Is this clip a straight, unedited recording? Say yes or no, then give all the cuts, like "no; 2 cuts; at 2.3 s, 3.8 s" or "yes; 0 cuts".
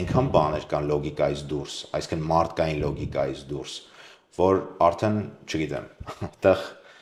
yes; 0 cuts